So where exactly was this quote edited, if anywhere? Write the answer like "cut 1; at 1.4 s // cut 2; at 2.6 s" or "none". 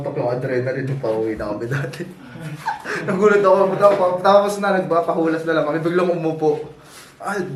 none